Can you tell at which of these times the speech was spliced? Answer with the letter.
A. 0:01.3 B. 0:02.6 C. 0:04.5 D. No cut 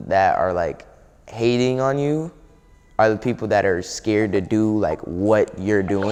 D